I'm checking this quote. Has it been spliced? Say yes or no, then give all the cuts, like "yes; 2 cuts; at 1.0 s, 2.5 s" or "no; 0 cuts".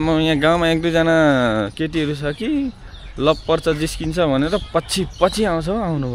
no; 0 cuts